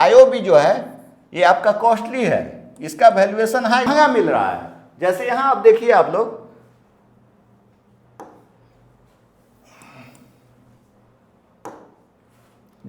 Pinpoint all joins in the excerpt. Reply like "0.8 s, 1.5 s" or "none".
3.9 s